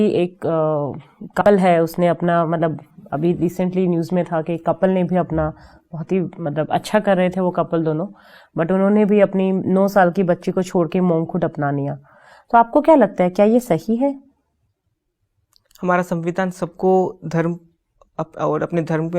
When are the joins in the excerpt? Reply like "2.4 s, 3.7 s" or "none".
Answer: 1.4 s